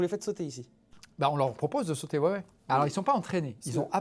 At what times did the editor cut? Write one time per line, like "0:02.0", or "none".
0:02.5